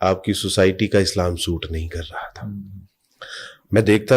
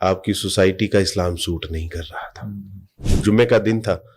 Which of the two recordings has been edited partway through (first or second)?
second